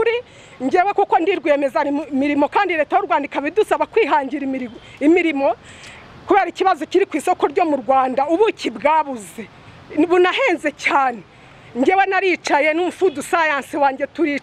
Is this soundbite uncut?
yes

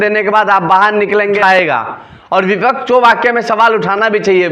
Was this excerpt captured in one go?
no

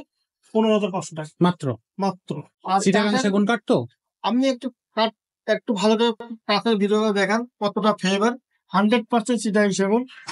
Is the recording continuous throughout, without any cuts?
no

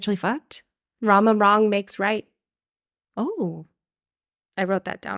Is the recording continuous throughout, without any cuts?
yes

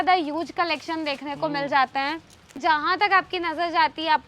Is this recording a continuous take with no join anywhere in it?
no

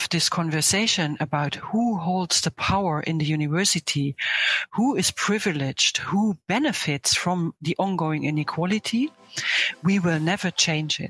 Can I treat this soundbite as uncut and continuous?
yes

